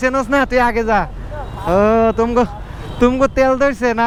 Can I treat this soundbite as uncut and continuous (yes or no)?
yes